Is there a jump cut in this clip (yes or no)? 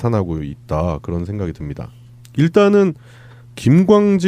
yes